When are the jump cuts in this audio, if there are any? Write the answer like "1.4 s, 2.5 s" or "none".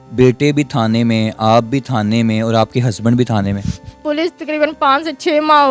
4.0 s

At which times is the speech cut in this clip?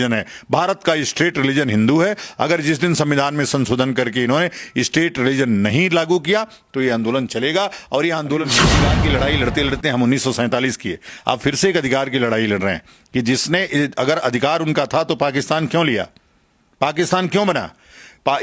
8.7 s

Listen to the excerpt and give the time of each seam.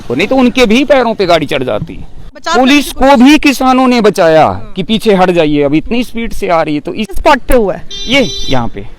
2.4 s, 7.2 s

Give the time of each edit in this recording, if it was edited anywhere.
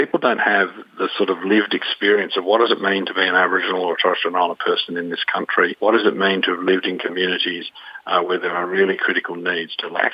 none

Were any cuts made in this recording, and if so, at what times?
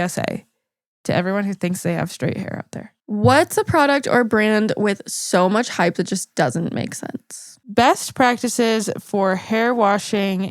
3.0 s, 7.5 s

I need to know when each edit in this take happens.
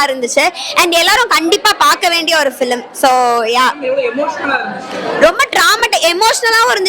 none

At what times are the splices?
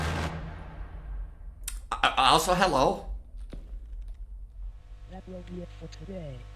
4.9 s

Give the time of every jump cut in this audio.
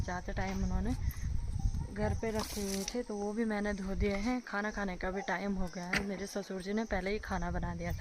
none

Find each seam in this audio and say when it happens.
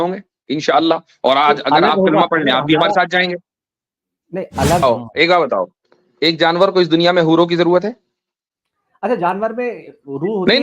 4.8 s

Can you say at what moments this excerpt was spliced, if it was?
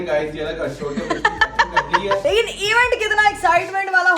2.2 s

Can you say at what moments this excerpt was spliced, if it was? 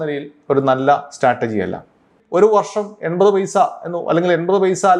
2.1 s

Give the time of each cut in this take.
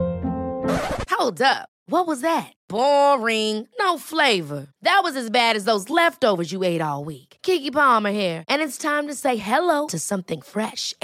none

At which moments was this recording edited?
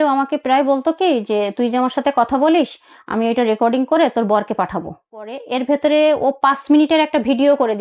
5.4 s

